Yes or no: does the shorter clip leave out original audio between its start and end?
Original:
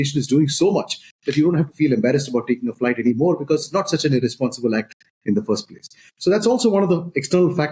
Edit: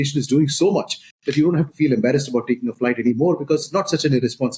no